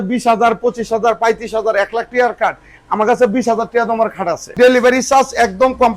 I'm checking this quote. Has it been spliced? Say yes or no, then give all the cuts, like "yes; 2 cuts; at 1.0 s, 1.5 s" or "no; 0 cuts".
yes; 1 cut; at 4.5 s